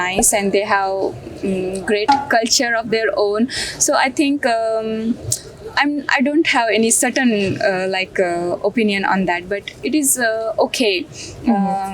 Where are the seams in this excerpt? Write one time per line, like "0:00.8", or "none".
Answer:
none